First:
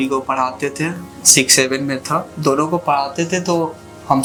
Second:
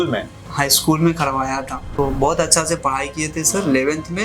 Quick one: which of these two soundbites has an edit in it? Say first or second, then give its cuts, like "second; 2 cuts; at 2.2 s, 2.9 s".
second; 1 cut; at 1.8 s